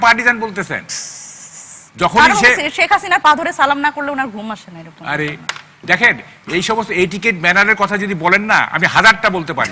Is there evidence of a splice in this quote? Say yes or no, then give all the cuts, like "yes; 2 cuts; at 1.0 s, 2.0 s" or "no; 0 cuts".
no; 0 cuts